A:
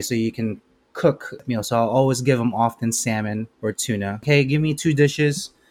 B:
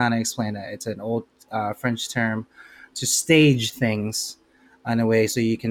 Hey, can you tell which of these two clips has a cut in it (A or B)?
A